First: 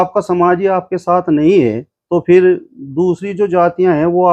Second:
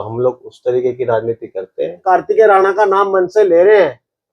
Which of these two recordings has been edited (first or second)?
second